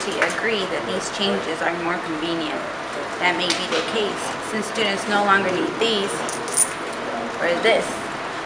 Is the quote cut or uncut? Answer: uncut